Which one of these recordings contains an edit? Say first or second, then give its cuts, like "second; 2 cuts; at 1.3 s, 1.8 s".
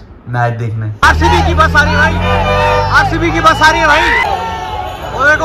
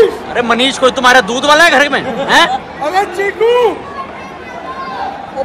first; 2 cuts; at 1.0 s, 4.3 s